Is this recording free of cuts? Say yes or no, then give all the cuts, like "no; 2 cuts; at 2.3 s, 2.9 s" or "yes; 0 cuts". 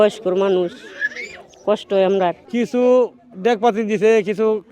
no; 1 cut; at 2.4 s